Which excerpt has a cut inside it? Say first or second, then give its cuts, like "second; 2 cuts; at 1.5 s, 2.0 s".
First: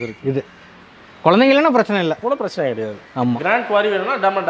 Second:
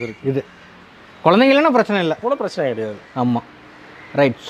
first; 1 cut; at 3.4 s